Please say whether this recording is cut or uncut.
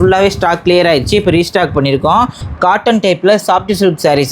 cut